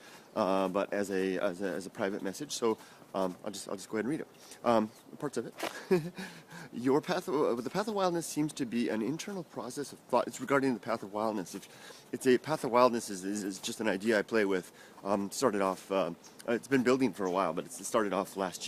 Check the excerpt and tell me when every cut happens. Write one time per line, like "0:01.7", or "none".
0:05.1